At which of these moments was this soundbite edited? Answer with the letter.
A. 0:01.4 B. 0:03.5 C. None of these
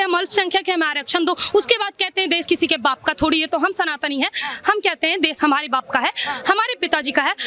C